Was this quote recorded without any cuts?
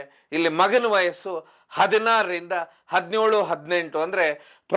yes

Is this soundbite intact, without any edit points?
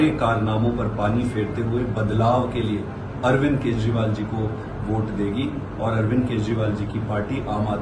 yes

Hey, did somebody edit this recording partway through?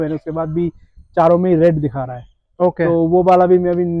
no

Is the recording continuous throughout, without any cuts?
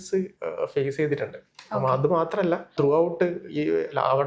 no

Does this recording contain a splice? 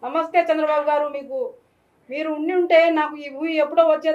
no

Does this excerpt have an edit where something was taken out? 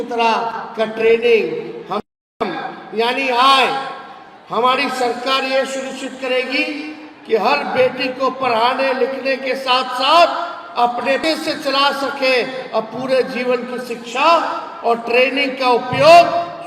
yes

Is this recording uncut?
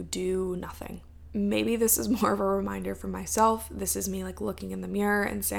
yes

